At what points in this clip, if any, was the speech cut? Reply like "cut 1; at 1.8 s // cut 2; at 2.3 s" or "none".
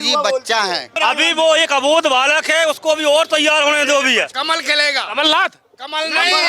cut 1; at 0.9 s // cut 2; at 4.3 s